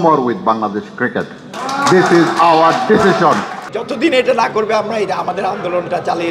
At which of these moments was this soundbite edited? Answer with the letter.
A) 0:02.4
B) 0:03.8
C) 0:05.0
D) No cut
B